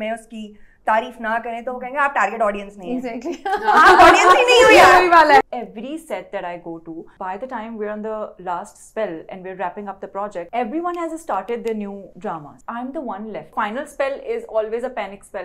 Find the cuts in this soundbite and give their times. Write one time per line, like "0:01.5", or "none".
0:05.4
0:07.1
0:10.5
0:12.3
0:13.5